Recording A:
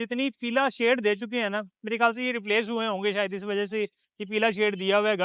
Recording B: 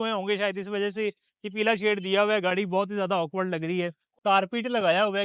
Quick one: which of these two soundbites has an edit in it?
B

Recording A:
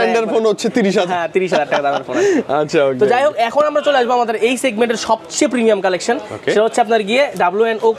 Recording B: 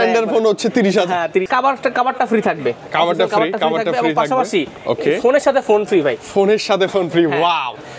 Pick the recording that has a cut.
B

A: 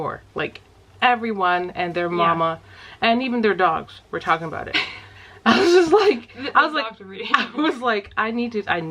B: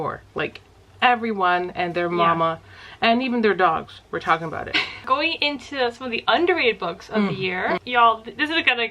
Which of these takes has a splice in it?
B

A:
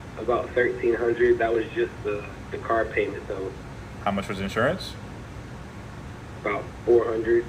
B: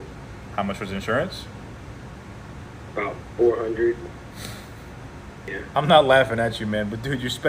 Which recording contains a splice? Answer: B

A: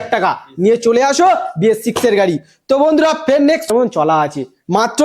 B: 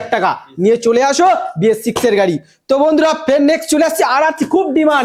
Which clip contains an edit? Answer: A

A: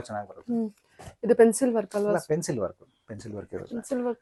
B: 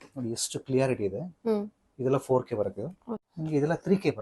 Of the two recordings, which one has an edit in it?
B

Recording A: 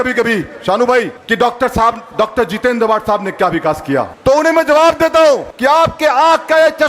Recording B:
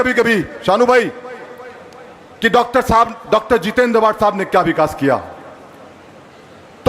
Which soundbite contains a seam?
A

